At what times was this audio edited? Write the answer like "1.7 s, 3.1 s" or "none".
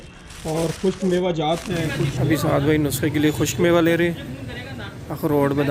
2.1 s